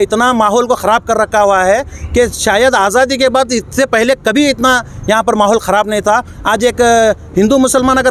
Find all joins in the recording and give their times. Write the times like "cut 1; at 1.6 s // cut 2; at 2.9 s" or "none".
none